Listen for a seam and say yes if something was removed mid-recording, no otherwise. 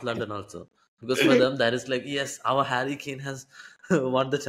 no